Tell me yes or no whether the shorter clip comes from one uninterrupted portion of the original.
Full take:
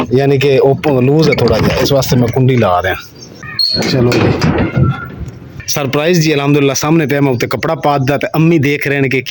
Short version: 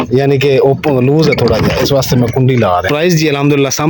no